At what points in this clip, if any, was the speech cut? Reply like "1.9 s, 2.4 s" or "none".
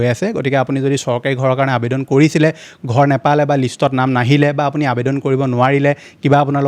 none